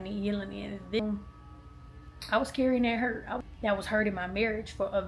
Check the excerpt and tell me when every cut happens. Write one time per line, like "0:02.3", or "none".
0:01.0
0:03.4